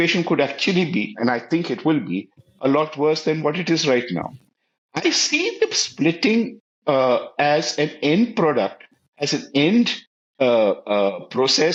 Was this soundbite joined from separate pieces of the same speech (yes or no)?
no